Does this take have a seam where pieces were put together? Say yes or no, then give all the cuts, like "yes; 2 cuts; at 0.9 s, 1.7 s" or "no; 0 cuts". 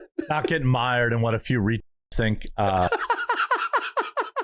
no; 0 cuts